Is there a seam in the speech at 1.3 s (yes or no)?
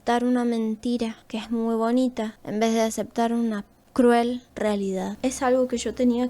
no